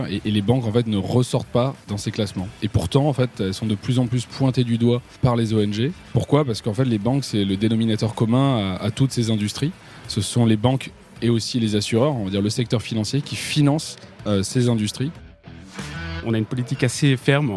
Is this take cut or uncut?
cut